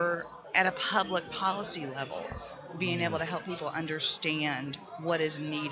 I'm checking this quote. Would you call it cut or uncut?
uncut